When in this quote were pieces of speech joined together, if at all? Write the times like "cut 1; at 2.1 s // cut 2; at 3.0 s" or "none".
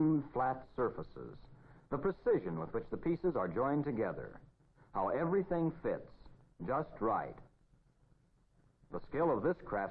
cut 1; at 6.1 s